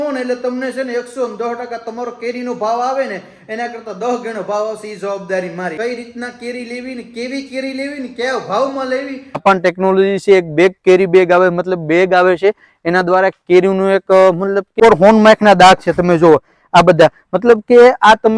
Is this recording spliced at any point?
yes; 3 cuts; at 5.7 s, 9.4 s, 14.7 s

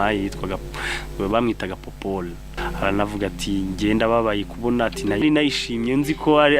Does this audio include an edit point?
yes; 1 cut; at 2.5 s

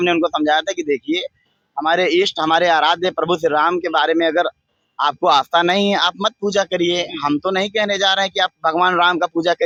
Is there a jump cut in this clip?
no; 0 cuts

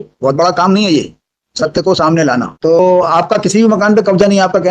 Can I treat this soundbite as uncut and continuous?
no; 1 cut; at 2.8 s

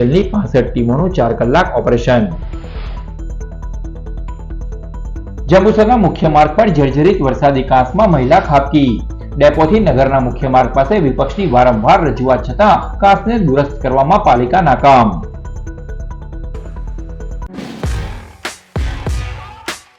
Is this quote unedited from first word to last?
no; 1 cut; at 17.5 s

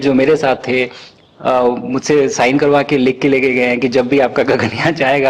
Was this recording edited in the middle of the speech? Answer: no; 0 cuts

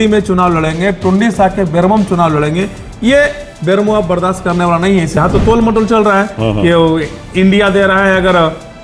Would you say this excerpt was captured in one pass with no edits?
no; 1 cut; at 5.2 s

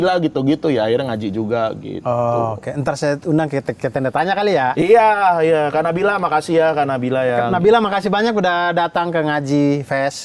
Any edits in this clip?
no; 0 cuts

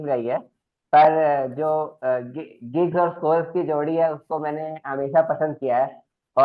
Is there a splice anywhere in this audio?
no; 0 cuts

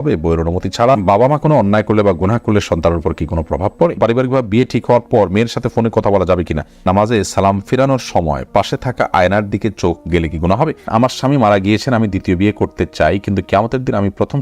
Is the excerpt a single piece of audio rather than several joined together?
no; 4 cuts; at 1.0 s, 4.0 s, 6.8 s, 10.9 s

